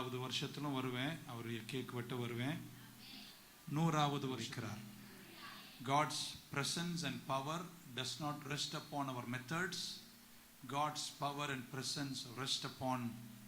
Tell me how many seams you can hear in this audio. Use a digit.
1